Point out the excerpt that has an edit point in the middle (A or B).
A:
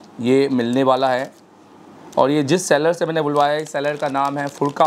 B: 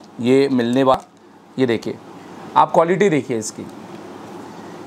B